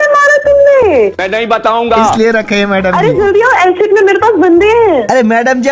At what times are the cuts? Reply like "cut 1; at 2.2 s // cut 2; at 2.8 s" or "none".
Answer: cut 1; at 2.1 s